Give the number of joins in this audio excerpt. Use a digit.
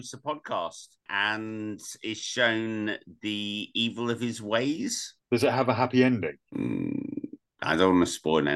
0